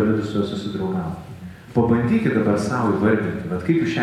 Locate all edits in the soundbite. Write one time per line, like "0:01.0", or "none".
0:01.5

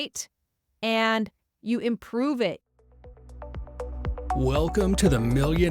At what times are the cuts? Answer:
0:02.6

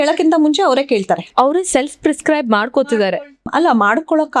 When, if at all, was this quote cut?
none

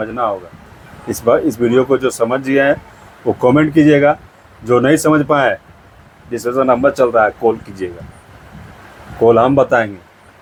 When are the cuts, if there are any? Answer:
none

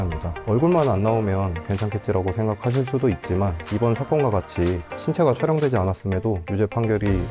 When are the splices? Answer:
none

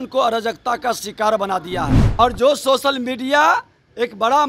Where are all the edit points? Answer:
0:02.0

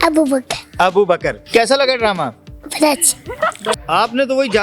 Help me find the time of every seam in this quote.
0:01.4
0:03.7

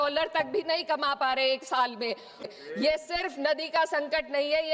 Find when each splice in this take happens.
0:02.4

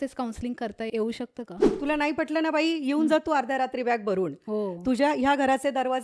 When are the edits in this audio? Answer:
0:01.7

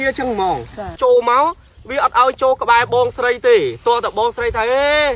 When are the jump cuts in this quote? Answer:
0:00.9

